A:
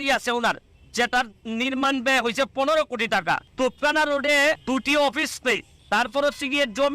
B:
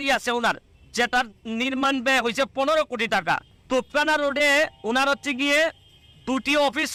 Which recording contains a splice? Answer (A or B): A